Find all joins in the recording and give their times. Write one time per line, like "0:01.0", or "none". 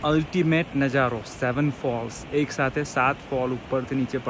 none